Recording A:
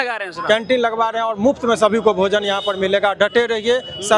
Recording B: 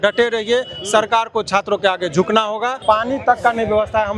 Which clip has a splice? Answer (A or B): B